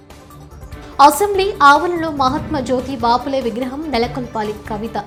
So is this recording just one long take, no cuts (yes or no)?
yes